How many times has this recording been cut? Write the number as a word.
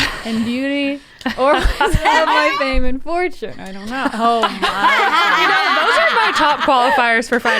one